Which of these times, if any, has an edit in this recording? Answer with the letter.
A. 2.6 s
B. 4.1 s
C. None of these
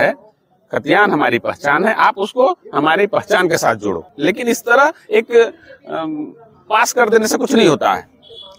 B